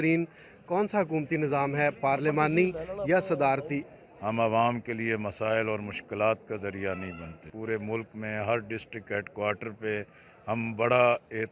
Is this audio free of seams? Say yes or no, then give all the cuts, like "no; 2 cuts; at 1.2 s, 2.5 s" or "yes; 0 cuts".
no; 2 cuts; at 3.8 s, 7.4 s